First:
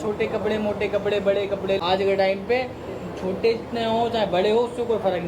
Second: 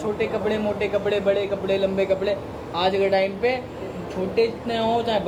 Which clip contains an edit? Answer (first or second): first